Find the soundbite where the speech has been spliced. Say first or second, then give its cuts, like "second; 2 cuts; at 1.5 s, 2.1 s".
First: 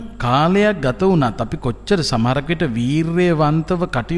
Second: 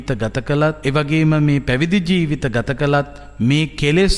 second; 2 cuts; at 0.8 s, 3.2 s